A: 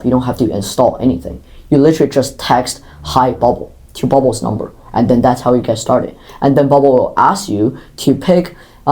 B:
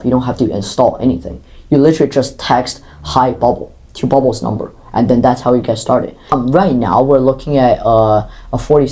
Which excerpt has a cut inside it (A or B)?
B